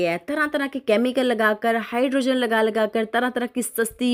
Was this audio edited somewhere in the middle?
no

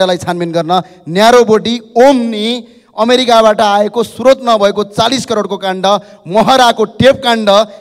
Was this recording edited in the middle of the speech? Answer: no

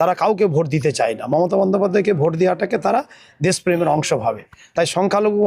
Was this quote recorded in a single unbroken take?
yes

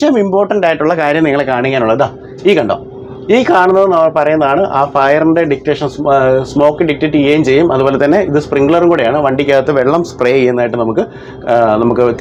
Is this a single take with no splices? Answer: yes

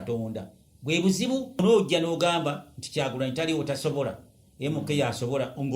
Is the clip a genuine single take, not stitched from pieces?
no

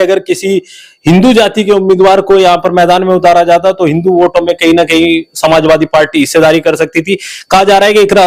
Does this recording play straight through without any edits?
yes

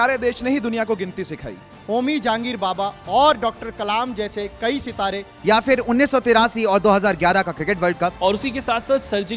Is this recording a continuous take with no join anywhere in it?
no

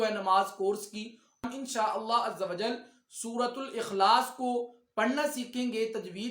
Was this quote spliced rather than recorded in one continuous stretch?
yes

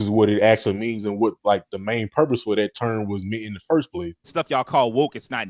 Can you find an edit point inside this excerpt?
yes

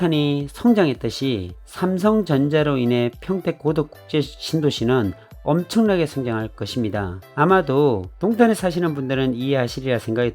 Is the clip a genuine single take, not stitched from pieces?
yes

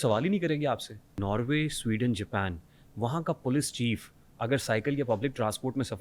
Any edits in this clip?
yes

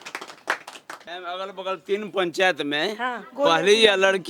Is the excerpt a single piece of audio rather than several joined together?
no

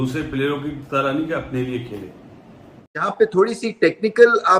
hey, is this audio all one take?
no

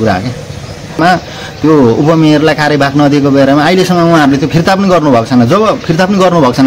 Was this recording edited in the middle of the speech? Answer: yes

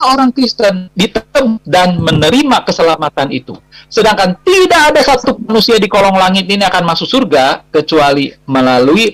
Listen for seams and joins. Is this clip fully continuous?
yes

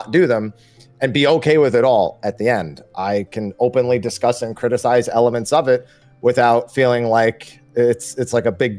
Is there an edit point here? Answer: no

